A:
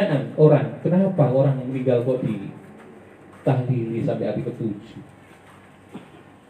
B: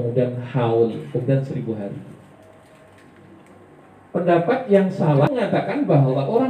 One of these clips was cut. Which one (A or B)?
B